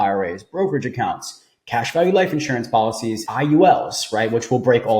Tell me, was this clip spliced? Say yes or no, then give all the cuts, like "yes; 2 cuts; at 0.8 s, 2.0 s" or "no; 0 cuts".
yes; 1 cut; at 3.2 s